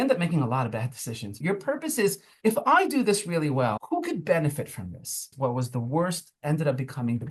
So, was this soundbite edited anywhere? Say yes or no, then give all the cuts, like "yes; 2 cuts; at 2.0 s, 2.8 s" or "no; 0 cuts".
yes; 4 cuts; at 1.4 s, 2.3 s, 3.8 s, 5.3 s